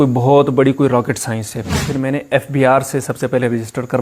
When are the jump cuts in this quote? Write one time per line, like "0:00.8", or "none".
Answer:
0:01.9